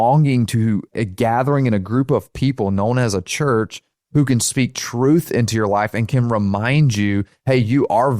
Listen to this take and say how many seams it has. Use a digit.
2